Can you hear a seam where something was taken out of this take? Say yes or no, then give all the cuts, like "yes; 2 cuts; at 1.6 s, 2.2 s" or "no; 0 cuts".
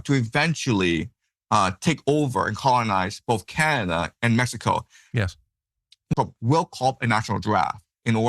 yes; 1 cut; at 6.1 s